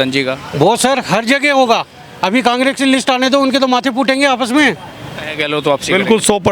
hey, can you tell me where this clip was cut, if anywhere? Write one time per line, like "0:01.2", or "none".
0:05.3

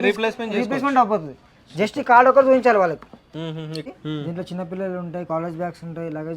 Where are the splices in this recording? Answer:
0:03.8

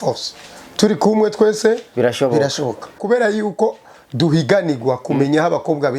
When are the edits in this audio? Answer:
0:03.0

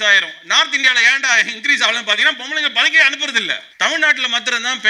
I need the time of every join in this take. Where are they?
0:03.6

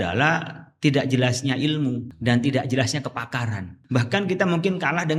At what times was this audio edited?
0:02.1
0:03.8

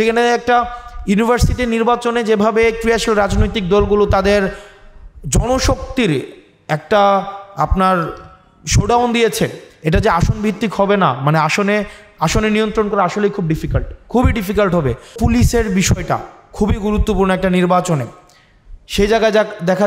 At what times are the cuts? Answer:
0:15.2

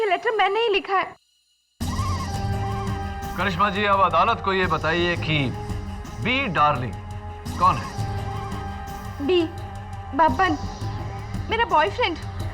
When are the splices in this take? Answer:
0:01.1

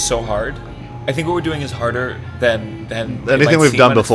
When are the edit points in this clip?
none

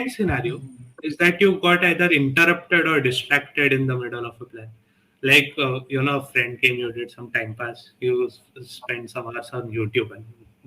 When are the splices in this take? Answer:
none

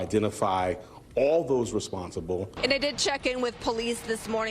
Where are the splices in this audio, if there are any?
0:02.5

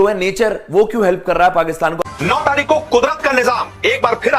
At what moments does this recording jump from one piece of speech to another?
0:02.0

